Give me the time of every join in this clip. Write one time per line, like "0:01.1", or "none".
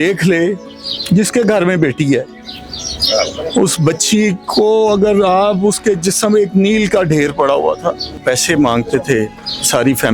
0:08.2